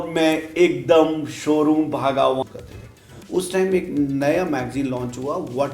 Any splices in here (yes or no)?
yes